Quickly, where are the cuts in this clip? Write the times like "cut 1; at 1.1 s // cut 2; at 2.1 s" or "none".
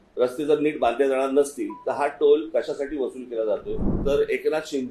cut 1; at 3.9 s